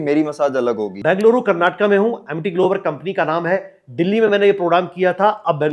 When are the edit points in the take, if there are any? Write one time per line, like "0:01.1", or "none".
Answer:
0:00.9